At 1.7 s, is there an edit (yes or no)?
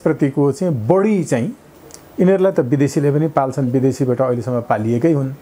no